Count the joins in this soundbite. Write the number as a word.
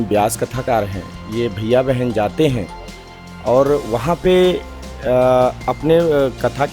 zero